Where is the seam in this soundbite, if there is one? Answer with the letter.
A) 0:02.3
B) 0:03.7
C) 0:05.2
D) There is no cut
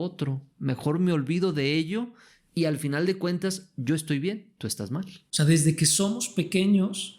C